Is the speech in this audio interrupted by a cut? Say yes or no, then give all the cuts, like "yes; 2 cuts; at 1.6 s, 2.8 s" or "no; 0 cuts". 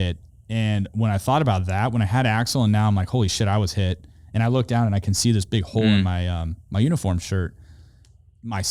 no; 0 cuts